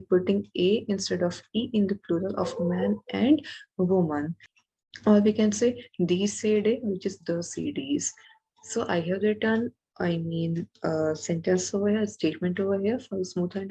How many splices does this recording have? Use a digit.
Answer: 1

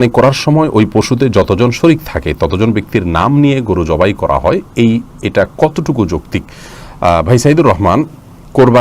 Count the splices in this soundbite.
0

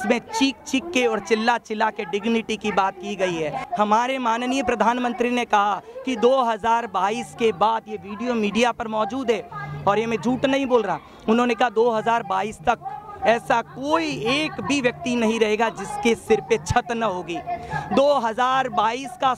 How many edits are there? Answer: 1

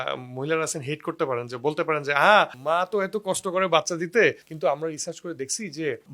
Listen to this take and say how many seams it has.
0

